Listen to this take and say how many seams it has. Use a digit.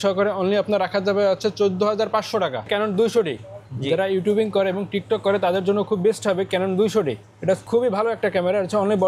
2